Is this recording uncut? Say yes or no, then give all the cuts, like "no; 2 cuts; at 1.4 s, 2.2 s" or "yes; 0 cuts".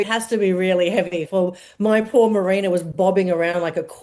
yes; 0 cuts